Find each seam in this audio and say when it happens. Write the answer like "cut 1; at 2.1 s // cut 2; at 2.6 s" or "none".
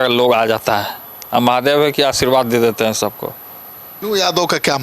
cut 1; at 3.9 s